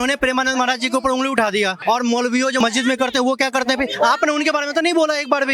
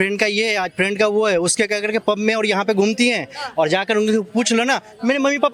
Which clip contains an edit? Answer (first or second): first